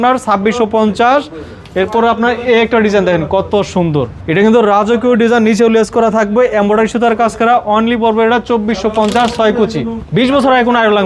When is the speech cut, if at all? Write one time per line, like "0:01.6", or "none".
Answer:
0:04.2
0:09.9